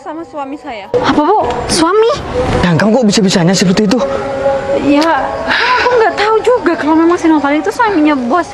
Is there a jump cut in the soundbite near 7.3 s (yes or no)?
no